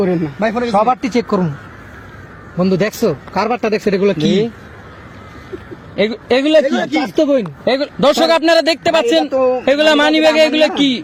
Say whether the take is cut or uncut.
uncut